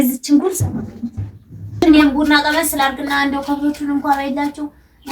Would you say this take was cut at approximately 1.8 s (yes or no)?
yes